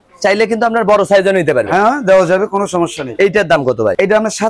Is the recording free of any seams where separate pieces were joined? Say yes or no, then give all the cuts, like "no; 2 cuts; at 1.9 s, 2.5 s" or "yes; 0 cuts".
yes; 0 cuts